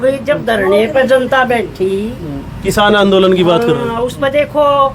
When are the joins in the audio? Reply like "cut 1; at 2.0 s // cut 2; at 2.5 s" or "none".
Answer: none

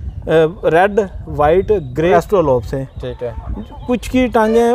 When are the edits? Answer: cut 1; at 2.1 s

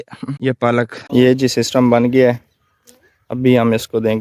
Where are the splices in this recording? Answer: cut 1; at 1.0 s

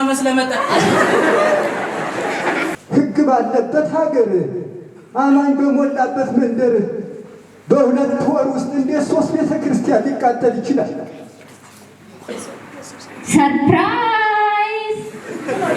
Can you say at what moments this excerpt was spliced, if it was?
cut 1; at 2.7 s // cut 2; at 12.3 s

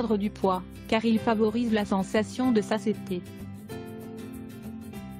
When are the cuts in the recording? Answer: cut 1; at 3.1 s

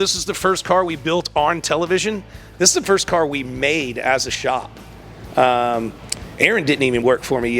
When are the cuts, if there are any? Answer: cut 1; at 2.4 s

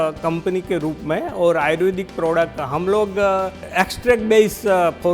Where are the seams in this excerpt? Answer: cut 1; at 3.6 s

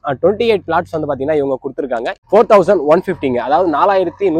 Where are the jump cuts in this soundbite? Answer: cut 1; at 2.2 s

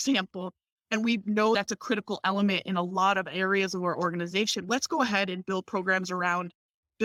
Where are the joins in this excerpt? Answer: none

